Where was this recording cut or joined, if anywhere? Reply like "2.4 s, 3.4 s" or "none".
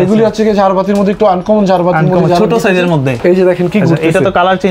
3.1 s